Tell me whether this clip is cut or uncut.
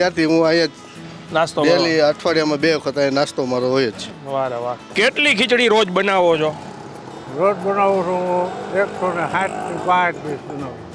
cut